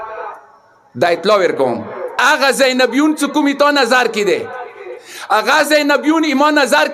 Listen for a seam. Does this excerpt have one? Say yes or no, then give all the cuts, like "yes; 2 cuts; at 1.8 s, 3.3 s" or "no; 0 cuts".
yes; 1 cut; at 2.1 s